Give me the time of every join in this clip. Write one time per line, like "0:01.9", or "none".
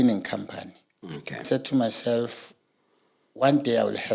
0:01.5